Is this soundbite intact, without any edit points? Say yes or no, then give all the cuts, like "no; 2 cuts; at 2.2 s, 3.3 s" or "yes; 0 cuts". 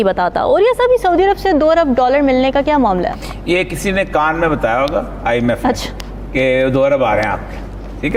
yes; 0 cuts